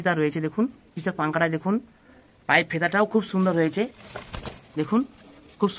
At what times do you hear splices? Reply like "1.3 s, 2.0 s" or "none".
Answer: none